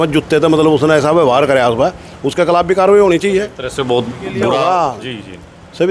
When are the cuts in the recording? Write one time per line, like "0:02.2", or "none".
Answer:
0:03.6
0:04.6